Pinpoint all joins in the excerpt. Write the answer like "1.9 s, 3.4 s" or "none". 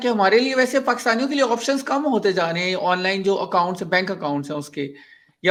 none